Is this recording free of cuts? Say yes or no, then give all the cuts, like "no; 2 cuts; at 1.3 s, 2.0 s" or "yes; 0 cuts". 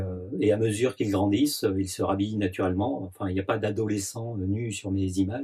yes; 0 cuts